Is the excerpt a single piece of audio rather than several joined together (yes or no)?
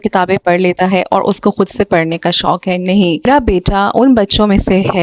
no